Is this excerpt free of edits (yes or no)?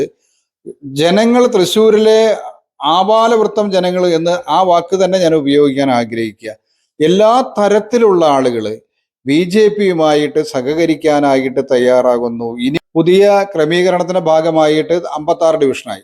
no